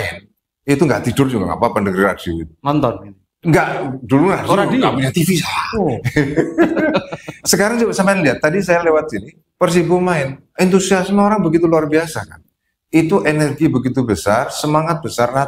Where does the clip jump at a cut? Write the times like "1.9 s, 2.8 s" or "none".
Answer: none